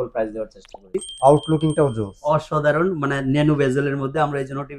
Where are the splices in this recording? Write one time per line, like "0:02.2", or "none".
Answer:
0:01.0